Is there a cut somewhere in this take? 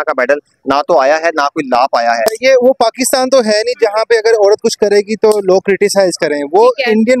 yes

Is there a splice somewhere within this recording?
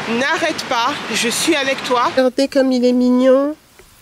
yes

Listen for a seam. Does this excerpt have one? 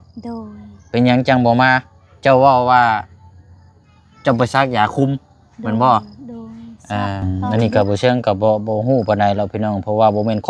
yes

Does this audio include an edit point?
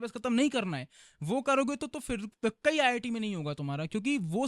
no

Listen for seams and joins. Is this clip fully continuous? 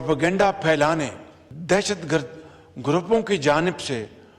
no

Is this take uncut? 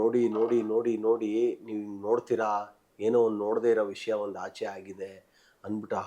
yes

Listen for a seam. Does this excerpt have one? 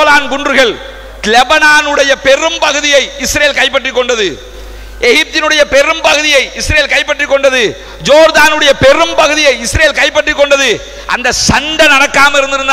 no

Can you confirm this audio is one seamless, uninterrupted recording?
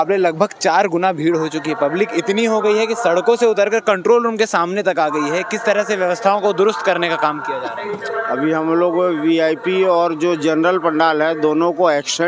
yes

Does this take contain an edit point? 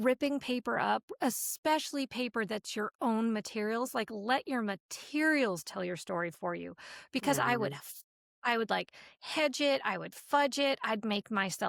no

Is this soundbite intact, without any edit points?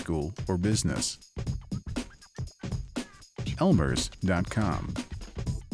no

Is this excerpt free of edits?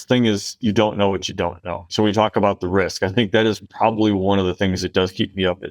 no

